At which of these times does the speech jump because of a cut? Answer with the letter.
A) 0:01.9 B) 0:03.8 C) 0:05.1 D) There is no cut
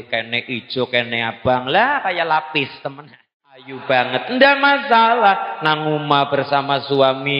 B